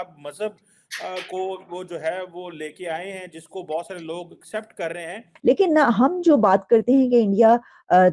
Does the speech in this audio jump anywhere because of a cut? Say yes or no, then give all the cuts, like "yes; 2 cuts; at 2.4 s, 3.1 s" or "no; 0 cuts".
yes; 1 cut; at 5.3 s